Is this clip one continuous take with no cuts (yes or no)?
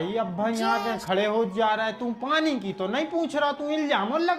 yes